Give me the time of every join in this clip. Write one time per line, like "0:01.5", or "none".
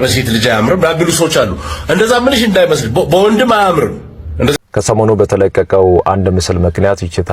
0:04.5